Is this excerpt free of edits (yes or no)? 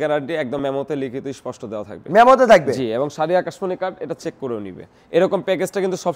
yes